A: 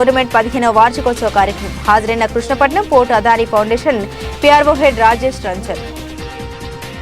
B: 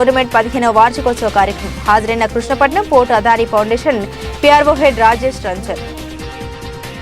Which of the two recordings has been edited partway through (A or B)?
B